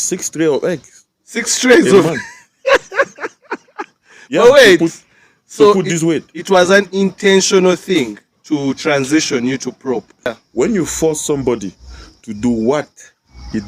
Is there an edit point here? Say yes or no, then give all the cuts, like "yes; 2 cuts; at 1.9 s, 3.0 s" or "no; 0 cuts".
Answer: yes; 1 cut; at 10.3 s